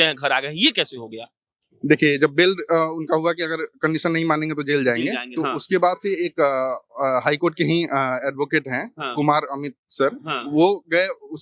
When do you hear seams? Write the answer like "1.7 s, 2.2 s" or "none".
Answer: none